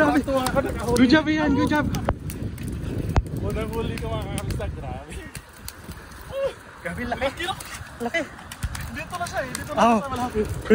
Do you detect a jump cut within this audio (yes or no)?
no